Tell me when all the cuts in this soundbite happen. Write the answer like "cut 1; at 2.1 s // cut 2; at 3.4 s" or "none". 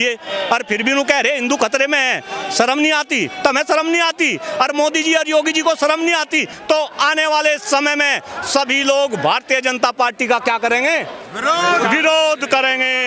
cut 1; at 6.5 s